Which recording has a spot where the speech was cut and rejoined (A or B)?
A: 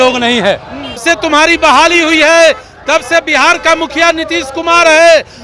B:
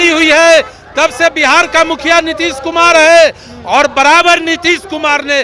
A